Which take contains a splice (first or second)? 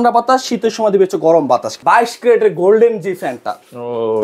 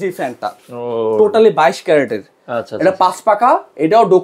first